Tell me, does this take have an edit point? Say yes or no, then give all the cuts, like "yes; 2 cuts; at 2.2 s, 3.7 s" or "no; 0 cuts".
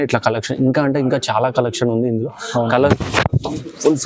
yes; 1 cut; at 2.9 s